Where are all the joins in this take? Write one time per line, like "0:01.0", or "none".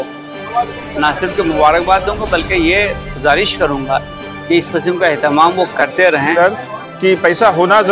0:06.3